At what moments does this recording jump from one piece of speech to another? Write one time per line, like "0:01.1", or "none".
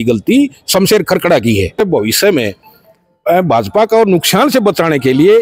0:01.8